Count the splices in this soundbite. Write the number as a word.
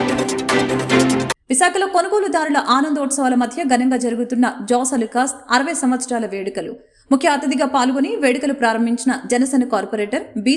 zero